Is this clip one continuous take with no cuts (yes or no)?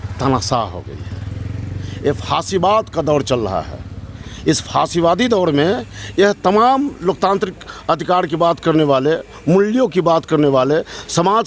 yes